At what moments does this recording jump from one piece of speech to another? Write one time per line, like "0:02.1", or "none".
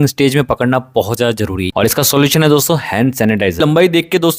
0:01.6
0:03.6